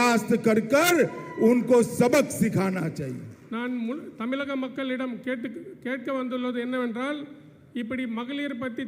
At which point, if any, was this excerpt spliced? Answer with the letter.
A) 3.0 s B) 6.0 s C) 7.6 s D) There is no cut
D